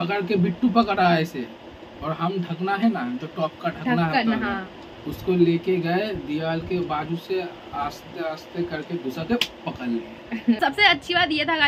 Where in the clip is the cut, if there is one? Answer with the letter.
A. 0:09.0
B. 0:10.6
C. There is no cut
B